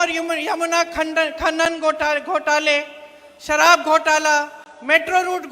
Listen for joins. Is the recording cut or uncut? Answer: uncut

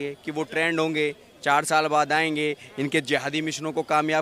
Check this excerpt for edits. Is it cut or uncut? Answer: uncut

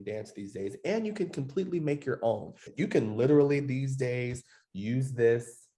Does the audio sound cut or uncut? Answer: cut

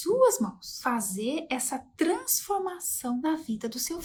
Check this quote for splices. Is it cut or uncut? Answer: uncut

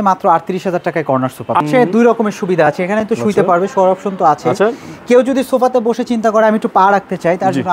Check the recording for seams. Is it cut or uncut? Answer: cut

